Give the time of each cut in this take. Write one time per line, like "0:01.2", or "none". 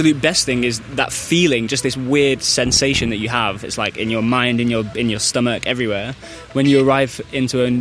none